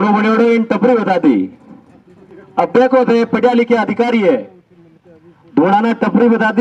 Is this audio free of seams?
yes; 0 cuts

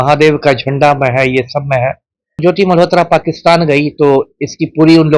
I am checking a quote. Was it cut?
yes; 1 cut; at 2.4 s

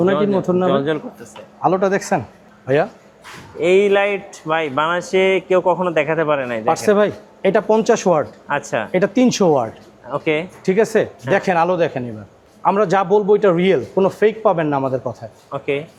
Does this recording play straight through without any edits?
yes; 0 cuts

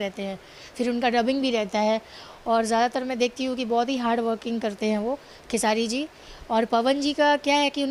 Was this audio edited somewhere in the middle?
no; 0 cuts

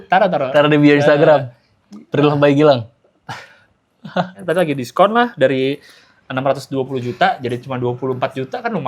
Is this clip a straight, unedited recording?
no; 1 cut; at 4.4 s

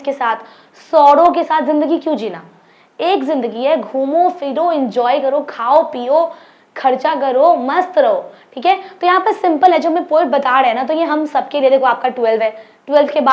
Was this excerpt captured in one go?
yes; 0 cuts

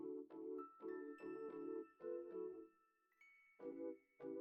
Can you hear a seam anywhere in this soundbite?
no; 0 cuts

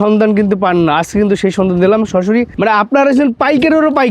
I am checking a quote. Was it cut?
yes; 1 cut; at 2.5 s

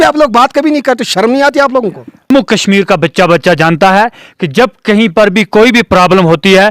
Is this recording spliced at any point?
yes; 1 cut; at 2.3 s

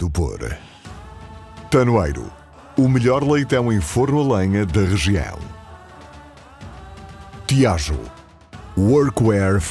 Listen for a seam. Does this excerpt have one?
yes; 1 cut; at 7.5 s

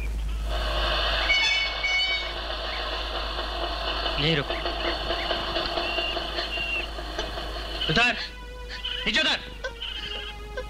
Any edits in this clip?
yes; 1 cut; at 6.3 s

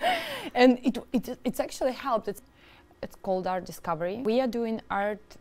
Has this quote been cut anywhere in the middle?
yes; 2 cuts; at 2.4 s, 4.2 s

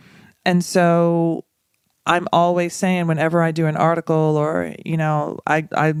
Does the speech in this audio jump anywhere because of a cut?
no; 0 cuts

